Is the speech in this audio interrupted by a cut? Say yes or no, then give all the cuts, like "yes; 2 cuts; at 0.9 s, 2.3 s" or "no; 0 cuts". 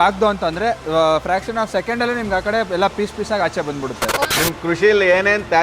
yes; 1 cut; at 4.2 s